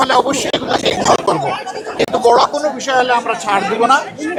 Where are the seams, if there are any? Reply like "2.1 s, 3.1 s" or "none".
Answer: none